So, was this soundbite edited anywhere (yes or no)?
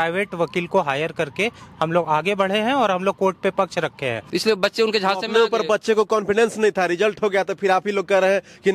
yes